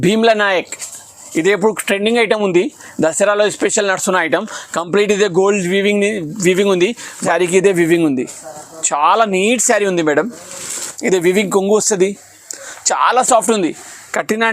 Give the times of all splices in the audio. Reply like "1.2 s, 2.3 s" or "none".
7.2 s, 10.9 s